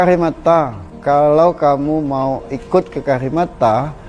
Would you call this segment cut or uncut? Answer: cut